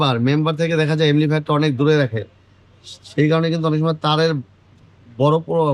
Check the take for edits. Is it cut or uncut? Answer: uncut